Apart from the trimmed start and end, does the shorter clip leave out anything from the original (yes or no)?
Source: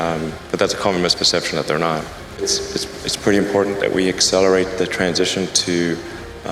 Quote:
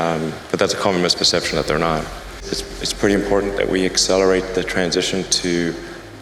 yes